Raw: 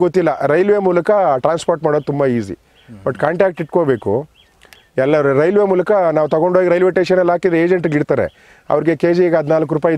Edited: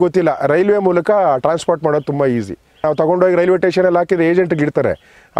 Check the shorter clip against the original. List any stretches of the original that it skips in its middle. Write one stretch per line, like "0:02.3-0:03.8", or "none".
0:02.8-0:06.2